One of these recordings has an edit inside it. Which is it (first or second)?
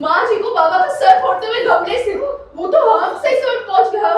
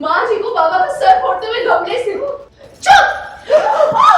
second